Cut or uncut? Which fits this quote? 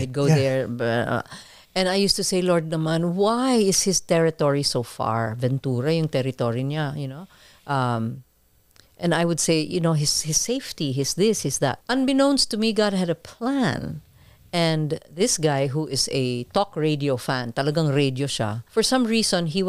cut